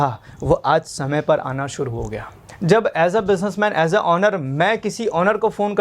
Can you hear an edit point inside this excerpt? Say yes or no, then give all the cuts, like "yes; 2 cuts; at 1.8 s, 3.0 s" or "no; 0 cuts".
yes; 1 cut; at 2.4 s